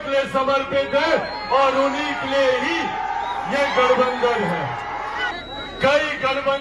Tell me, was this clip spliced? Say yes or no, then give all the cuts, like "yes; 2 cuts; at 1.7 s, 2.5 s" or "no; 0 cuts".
yes; 1 cut; at 5.3 s